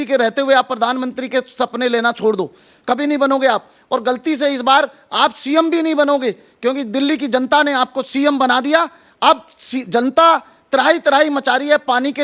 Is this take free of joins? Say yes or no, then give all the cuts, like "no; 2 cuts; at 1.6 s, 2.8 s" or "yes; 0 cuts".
yes; 0 cuts